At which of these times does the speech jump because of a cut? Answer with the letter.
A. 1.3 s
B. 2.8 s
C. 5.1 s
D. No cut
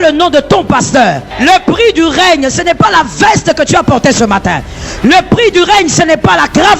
A